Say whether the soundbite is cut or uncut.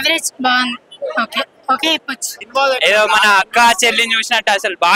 cut